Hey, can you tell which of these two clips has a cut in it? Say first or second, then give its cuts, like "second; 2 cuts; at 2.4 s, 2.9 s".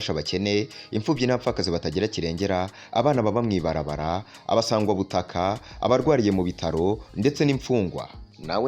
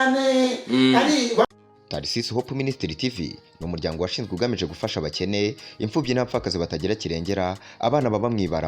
second; 1 cut; at 1.4 s